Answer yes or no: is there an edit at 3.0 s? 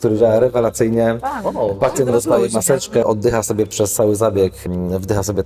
yes